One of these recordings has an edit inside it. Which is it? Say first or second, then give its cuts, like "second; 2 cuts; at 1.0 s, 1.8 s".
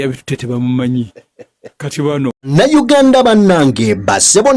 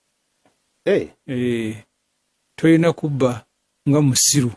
first; 1 cut; at 2.5 s